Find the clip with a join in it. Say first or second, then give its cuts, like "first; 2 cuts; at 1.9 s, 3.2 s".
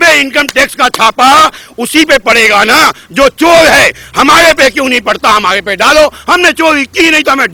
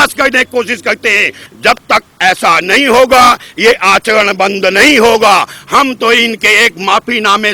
second; 1 cut; at 1.5 s